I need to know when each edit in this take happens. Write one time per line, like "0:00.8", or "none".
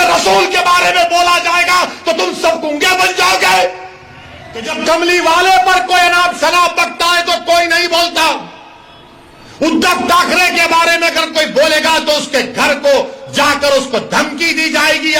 0:04.7